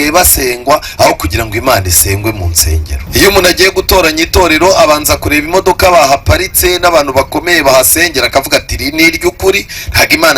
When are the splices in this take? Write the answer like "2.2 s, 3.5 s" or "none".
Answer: 2.9 s